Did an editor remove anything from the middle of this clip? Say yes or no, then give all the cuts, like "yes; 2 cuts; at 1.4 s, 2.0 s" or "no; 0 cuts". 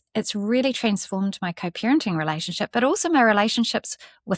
no; 0 cuts